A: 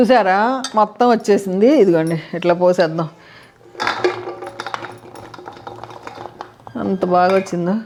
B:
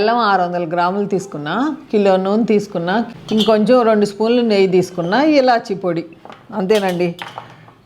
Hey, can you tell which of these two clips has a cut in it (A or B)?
B